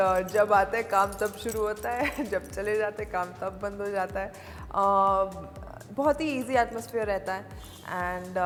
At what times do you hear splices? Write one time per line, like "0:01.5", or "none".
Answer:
none